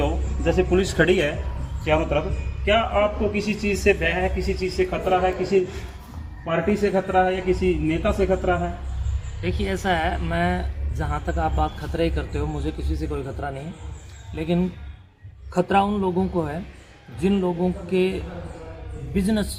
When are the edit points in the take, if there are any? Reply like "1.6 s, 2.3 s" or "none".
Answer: none